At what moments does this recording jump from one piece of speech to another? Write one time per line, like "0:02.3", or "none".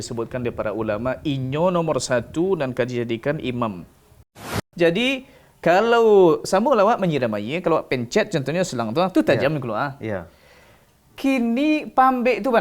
0:04.6